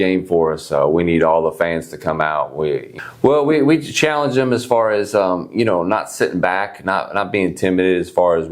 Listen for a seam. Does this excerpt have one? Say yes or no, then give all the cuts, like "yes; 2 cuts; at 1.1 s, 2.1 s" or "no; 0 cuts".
yes; 1 cut; at 3.0 s